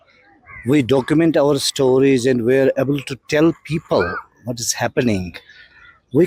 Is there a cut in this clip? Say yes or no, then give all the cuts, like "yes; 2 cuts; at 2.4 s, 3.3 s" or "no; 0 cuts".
no; 0 cuts